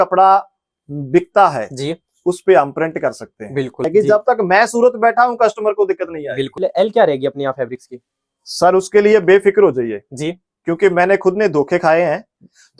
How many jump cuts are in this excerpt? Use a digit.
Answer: 2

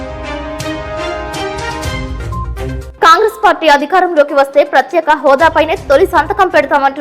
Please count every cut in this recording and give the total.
1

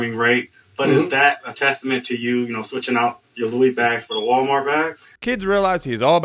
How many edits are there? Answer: 1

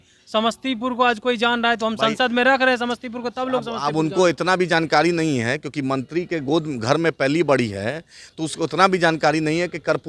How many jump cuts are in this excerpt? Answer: 0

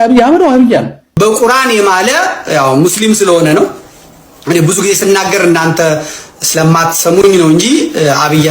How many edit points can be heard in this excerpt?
1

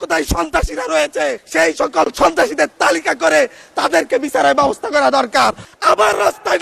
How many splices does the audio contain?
2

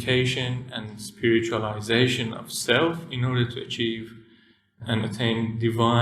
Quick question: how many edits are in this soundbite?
1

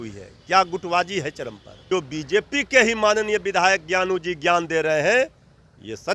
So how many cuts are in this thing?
1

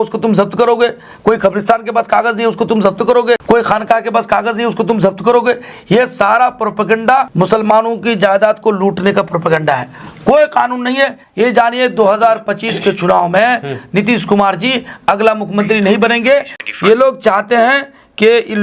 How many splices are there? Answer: 4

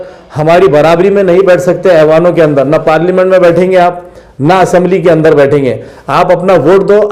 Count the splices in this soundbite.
0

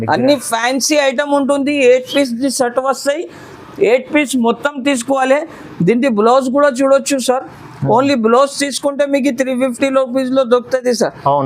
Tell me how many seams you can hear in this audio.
0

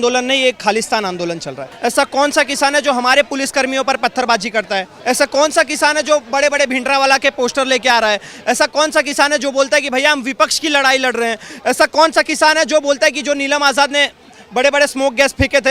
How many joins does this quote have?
2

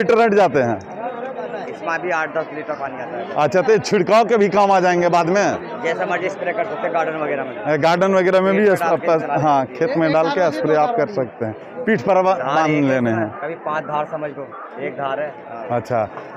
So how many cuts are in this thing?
0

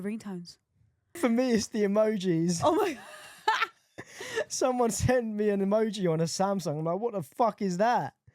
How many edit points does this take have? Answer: 1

